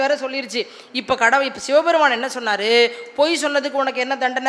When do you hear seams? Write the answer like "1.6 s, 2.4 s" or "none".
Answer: none